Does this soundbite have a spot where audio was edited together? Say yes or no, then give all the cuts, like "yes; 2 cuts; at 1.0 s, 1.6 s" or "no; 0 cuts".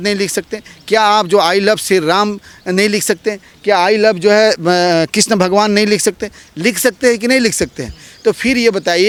no; 0 cuts